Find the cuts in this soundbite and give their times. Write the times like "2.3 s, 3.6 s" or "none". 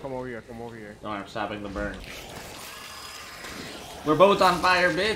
2.0 s